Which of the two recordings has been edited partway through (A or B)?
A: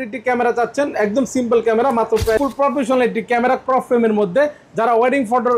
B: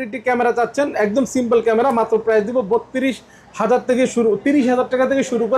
A